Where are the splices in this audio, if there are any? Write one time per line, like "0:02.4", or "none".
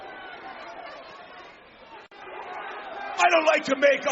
0:02.2